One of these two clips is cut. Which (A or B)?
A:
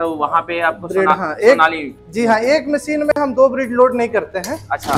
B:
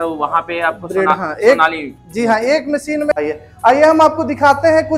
B